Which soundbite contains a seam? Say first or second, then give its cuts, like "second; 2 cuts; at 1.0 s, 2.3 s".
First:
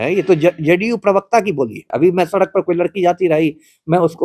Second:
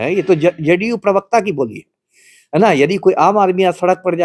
first; 1 cut; at 1.9 s